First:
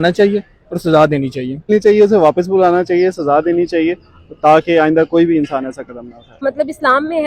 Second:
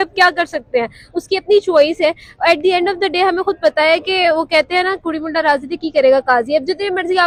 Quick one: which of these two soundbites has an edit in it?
first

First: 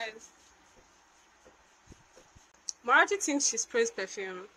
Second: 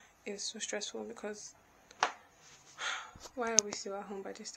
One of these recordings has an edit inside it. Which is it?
first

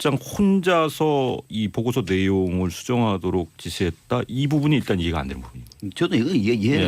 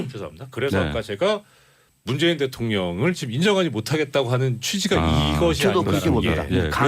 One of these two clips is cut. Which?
second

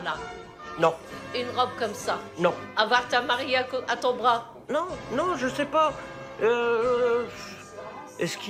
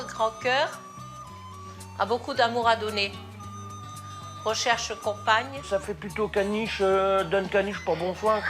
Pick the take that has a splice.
second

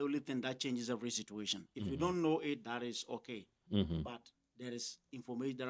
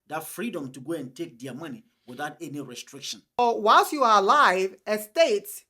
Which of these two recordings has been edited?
second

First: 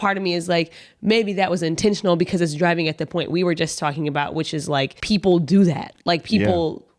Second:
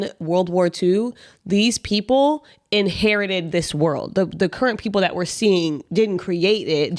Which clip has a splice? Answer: first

